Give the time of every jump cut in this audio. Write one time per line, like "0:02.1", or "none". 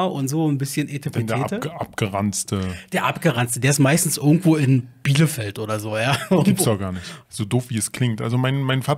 0:07.2